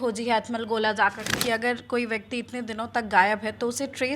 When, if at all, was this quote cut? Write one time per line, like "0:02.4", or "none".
0:01.4